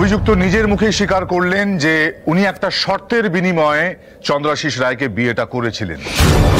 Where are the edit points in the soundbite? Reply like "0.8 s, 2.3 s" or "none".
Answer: none